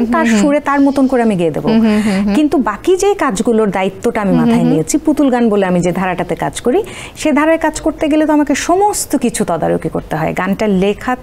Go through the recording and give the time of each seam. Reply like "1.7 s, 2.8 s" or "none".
none